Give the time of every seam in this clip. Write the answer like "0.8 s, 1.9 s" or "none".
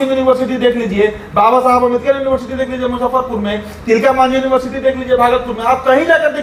none